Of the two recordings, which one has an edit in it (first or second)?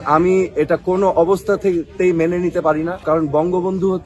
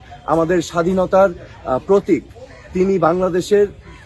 first